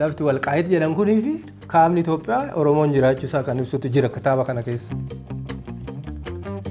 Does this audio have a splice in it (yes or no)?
yes